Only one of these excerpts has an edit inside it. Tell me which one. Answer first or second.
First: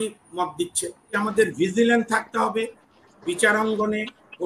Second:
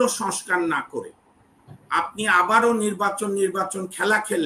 first